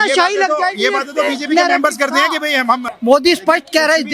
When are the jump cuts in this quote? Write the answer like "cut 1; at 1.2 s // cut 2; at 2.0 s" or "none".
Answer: cut 1; at 2.9 s